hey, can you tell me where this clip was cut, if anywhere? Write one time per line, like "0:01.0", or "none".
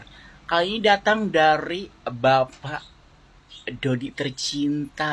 none